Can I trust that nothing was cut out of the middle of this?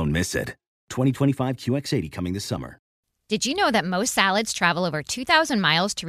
no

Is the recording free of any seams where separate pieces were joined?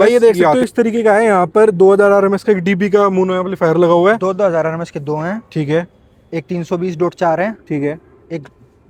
yes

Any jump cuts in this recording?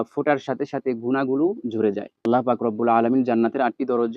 yes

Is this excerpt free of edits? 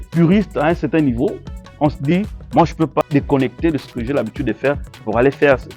no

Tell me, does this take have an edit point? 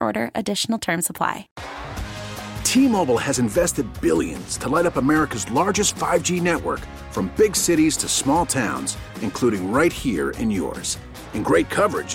yes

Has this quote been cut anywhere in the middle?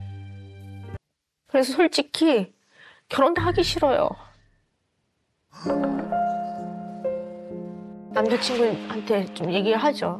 yes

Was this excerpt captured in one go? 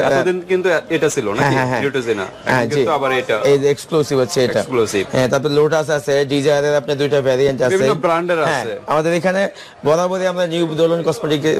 yes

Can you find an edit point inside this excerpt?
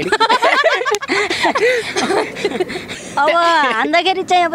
yes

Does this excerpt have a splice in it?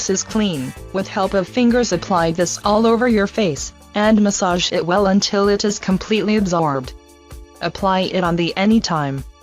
no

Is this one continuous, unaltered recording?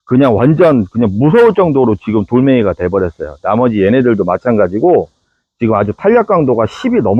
yes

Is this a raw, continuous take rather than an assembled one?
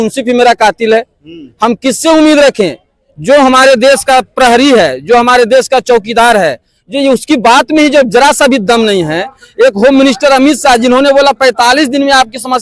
yes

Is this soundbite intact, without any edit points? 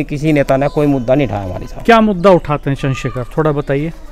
yes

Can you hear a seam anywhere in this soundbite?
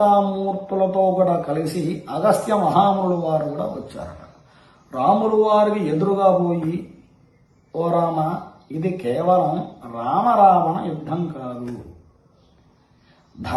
no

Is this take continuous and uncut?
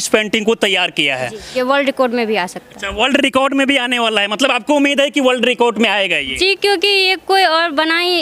no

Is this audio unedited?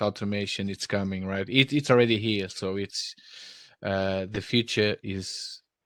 yes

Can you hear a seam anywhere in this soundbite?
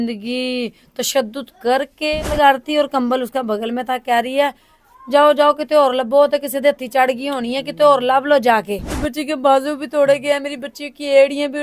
yes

